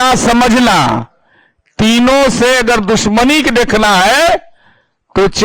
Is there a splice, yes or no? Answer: no